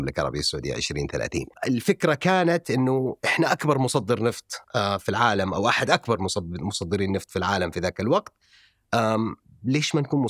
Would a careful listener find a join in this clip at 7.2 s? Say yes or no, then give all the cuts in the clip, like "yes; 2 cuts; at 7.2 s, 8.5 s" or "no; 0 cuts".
no; 1 cut; at 1.5 s